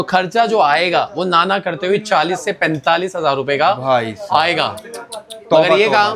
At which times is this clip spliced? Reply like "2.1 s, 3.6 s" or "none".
none